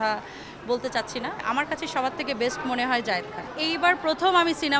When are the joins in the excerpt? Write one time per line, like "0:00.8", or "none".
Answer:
0:01.4

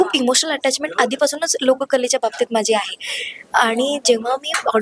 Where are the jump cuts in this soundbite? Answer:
none

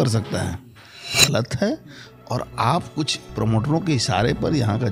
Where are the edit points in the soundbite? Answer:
0:01.2

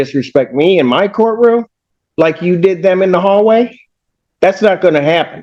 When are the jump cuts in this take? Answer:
none

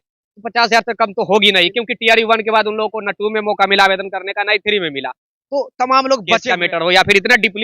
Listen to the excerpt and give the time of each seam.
0:06.4

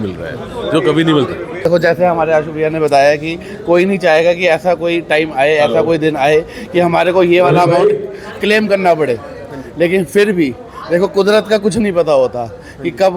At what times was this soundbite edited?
0:01.7

